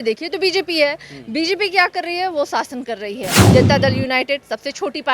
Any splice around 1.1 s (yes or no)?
no